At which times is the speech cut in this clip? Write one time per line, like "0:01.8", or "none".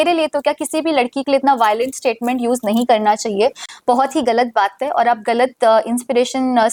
none